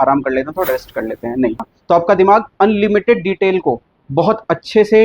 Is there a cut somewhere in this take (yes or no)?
yes